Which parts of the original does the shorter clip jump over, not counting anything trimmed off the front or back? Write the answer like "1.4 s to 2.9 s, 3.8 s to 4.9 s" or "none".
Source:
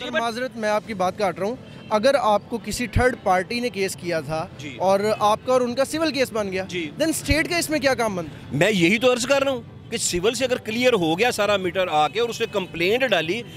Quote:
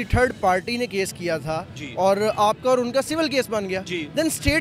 none

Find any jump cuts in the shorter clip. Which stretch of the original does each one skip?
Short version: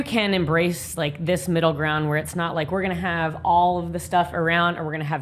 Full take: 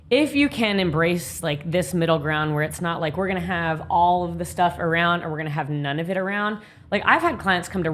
none

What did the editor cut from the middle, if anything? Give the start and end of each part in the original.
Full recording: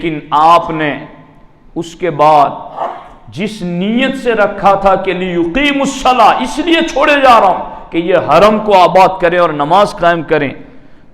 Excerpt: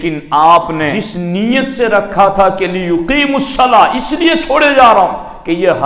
1.0 s to 3.5 s

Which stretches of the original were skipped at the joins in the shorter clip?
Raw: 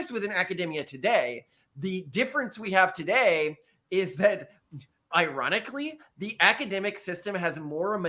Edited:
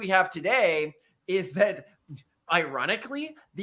none

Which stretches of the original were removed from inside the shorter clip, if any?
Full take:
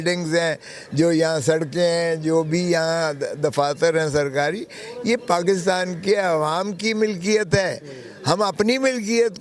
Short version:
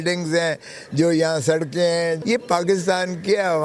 2.2 s to 5.0 s

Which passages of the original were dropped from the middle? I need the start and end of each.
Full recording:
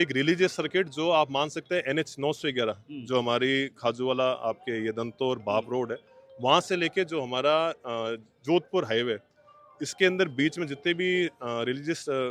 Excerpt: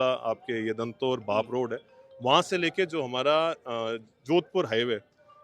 none

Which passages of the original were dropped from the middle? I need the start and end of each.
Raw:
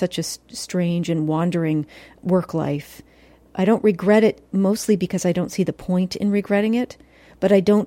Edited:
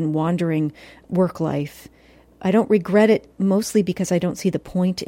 none

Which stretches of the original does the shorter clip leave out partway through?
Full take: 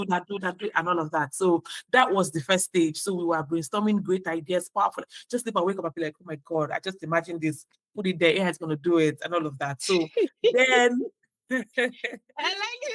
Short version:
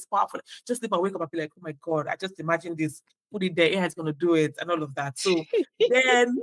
none

